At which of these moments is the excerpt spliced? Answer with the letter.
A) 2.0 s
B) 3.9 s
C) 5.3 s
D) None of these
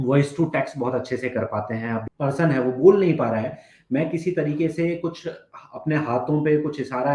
A